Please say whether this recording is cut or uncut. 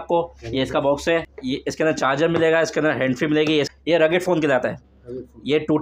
cut